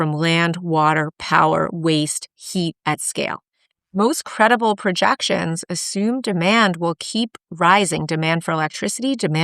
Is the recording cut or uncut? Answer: cut